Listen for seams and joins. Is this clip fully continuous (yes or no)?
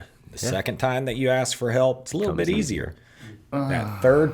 yes